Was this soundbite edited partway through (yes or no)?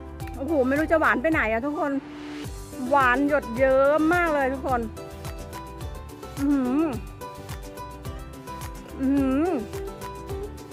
yes